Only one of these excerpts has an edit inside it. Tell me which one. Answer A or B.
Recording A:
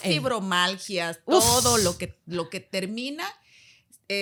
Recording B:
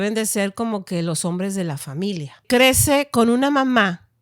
B